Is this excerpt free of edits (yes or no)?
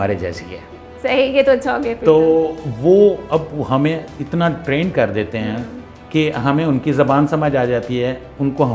yes